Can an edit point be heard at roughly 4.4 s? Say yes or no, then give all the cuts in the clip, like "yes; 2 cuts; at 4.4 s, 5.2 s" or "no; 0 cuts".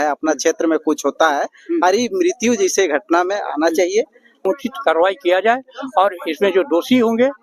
yes; 1 cut; at 4.4 s